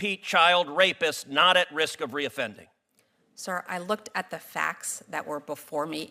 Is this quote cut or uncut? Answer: uncut